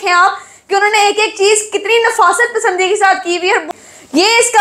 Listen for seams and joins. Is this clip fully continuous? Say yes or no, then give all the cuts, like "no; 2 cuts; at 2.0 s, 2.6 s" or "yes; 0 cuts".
no; 1 cut; at 3.7 s